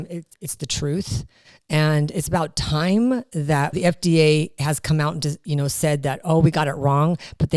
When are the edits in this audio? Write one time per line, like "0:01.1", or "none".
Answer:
none